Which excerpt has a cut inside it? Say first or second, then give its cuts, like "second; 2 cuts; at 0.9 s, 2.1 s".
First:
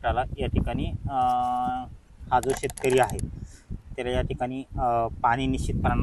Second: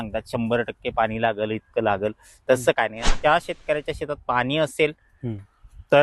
second; 1 cut; at 3.1 s